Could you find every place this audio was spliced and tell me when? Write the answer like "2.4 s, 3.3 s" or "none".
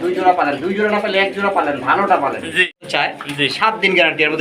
2.9 s